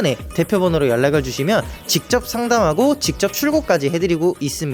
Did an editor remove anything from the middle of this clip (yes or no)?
no